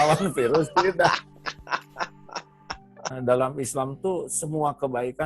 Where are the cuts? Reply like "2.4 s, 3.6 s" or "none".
3.1 s